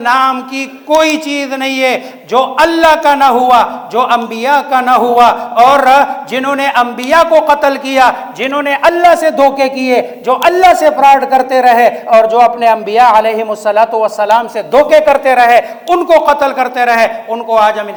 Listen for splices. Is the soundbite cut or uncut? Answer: uncut